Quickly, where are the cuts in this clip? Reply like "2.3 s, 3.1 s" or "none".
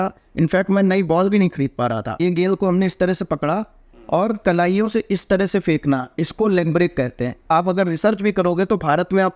2.2 s, 7.4 s